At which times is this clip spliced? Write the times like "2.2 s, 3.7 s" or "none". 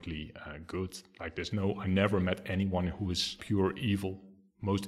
3.4 s